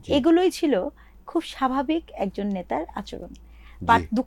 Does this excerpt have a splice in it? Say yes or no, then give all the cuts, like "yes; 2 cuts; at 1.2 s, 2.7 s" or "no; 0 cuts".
no; 0 cuts